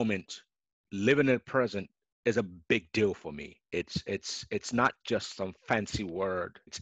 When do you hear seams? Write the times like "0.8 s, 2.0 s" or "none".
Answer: none